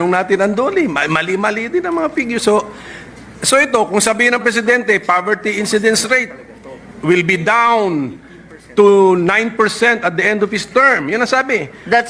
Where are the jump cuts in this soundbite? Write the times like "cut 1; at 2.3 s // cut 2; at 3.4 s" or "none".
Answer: none